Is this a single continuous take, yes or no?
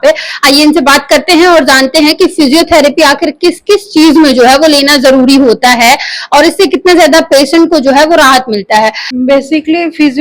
no